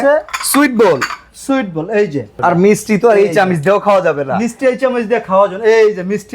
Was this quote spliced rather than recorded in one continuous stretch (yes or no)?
yes